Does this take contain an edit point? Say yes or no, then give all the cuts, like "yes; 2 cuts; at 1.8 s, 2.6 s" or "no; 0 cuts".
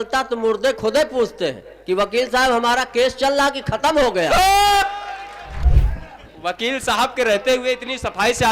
yes; 1 cut; at 5.6 s